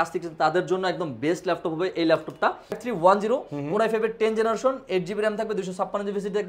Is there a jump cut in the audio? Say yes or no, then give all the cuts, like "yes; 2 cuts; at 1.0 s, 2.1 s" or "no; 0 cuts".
yes; 1 cut; at 2.8 s